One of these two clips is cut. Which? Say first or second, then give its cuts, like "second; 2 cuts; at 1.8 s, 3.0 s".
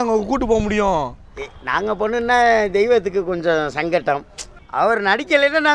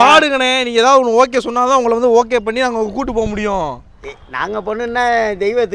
first; 1 cut; at 4.4 s